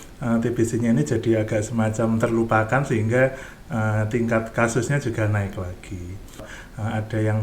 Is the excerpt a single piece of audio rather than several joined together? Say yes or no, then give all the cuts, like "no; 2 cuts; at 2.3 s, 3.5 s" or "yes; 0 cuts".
no; 1 cut; at 6.4 s